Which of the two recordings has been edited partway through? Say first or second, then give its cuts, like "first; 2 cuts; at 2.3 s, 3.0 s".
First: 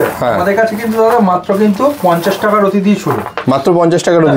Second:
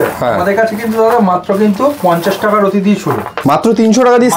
second; 1 cut; at 3.3 s